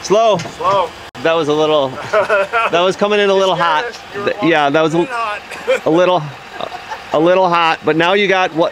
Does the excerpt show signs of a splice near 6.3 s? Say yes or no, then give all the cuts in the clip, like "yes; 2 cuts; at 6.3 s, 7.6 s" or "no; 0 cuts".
no; 1 cut; at 1.0 s